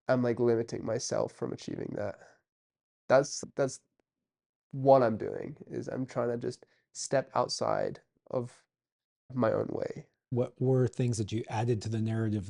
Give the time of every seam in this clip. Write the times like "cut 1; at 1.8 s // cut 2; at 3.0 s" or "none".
cut 1; at 3.4 s // cut 2; at 9.3 s // cut 3; at 10.2 s